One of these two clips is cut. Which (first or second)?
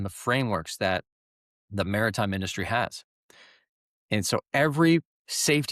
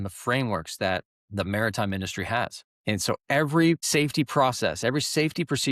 second